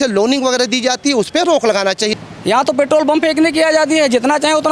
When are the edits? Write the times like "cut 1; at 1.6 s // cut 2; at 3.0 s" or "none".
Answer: cut 1; at 2.1 s